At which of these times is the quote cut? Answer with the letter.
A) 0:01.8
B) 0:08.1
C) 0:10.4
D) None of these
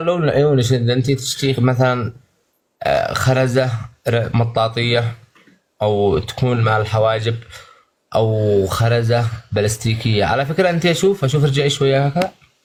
D